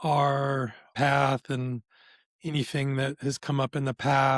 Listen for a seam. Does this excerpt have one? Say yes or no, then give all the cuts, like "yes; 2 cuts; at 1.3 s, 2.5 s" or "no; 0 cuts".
yes; 1 cut; at 0.9 s